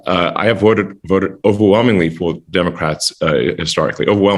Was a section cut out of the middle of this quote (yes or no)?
no